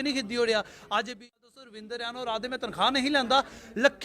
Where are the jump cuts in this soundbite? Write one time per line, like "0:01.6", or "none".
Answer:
0:01.2